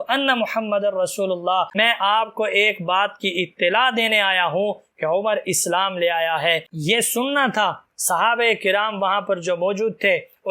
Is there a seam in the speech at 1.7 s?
yes; 2 cuts; at 1.7 s, 6.8 s

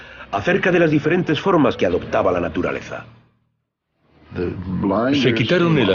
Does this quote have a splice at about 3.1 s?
no; 0 cuts

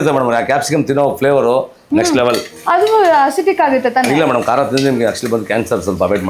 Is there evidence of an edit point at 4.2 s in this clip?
no; 1 cut; at 2.5 s

